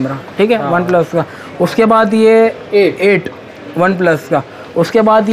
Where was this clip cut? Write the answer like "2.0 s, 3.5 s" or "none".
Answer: none